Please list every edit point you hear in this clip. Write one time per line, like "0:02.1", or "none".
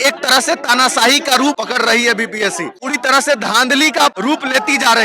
0:01.6
0:02.8
0:04.2